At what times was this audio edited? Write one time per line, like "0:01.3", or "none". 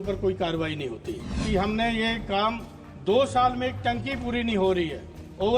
0:01.4